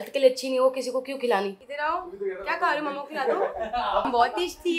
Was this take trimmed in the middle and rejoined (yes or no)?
no